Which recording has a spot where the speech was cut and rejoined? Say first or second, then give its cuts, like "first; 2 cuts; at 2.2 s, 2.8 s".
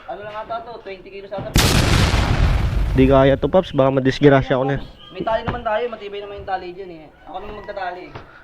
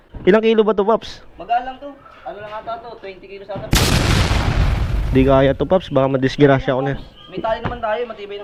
first; 1 cut; at 7.3 s